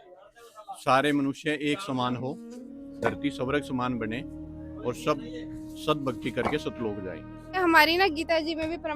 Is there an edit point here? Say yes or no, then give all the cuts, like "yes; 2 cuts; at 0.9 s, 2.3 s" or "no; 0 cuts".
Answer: yes; 1 cut; at 7.6 s